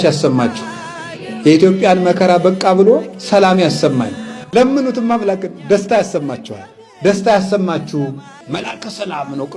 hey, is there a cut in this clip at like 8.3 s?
yes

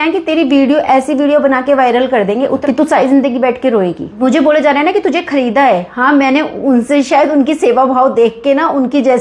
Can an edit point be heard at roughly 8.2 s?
no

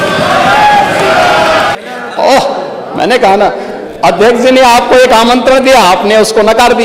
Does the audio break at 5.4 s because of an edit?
no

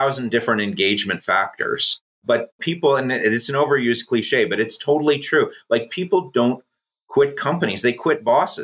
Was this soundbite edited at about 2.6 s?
yes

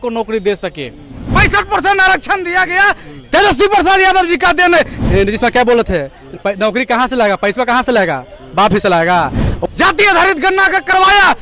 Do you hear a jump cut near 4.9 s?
yes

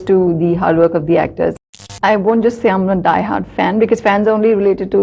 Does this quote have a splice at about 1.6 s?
yes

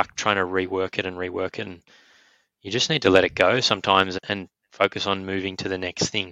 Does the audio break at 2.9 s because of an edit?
no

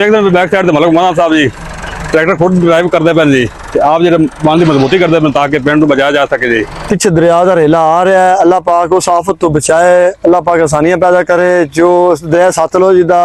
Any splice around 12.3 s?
no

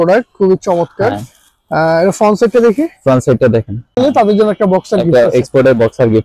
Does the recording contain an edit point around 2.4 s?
no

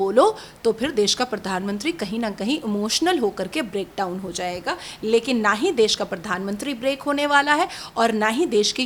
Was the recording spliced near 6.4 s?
no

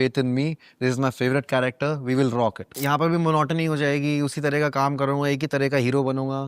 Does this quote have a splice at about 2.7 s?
yes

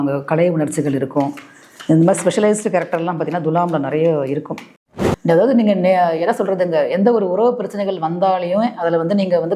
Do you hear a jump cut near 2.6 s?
no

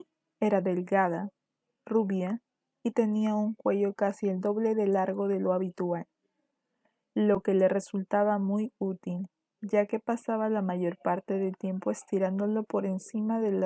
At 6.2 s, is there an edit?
no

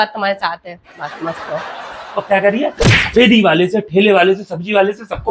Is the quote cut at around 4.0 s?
no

